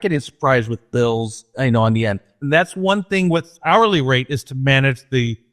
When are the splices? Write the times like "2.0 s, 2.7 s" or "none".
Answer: 1.5 s, 2.3 s, 3.5 s